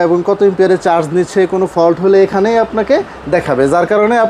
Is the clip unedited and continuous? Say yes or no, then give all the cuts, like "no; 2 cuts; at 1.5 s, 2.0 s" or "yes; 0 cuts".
yes; 0 cuts